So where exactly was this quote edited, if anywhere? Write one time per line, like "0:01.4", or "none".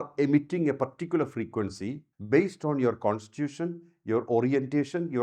0:02.1